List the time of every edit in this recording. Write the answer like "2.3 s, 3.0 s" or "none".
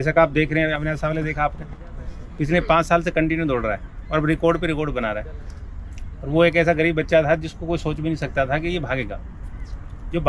none